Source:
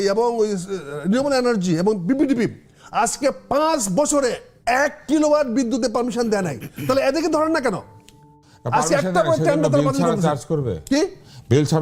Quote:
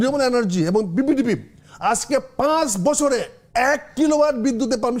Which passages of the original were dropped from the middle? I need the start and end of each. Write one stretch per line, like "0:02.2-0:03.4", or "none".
none

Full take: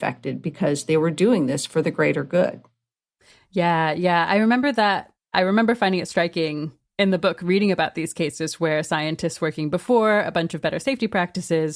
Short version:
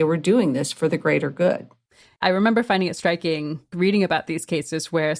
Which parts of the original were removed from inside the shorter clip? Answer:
0:03.0-0:05.1
0:06.8-0:07.4

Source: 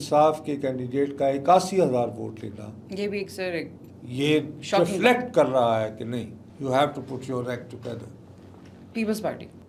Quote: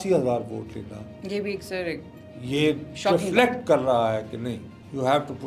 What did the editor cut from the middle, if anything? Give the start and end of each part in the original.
none

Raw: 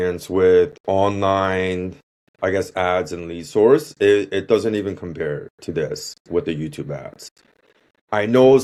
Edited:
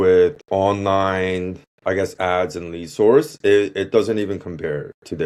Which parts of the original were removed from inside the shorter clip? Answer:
0:02.0-0:02.2

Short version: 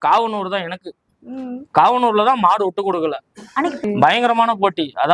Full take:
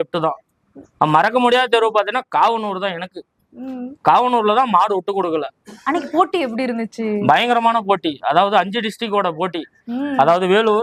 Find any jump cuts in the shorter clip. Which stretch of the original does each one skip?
0:06.1-0:07.1

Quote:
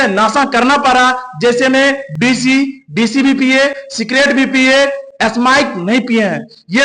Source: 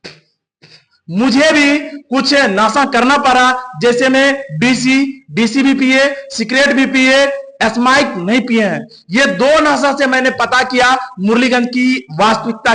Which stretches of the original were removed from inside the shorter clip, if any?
none

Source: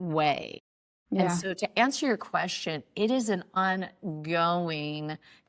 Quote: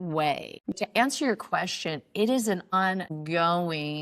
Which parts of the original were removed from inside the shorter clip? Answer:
0:00.8-0:01.6
0:03.7-0:03.9

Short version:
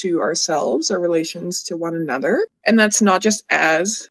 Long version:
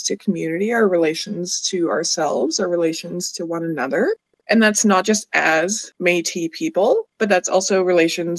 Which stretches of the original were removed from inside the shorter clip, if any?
0:04.2-0:04.4

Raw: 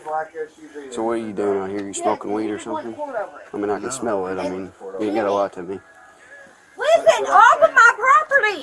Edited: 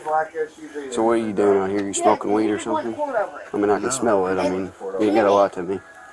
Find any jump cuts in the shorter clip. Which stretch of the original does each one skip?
none

